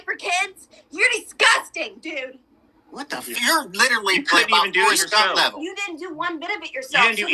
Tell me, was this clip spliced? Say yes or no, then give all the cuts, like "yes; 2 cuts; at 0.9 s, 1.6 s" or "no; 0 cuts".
yes; 1 cut; at 3.3 s